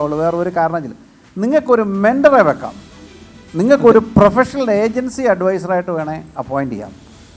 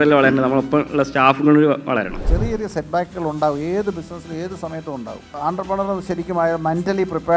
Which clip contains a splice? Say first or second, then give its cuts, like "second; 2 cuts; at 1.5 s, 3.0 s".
second; 2 cuts; at 2.2 s, 5.2 s